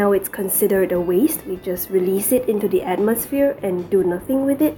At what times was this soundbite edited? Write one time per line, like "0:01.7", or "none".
none